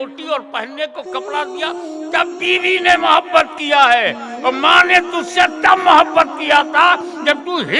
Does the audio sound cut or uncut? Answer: uncut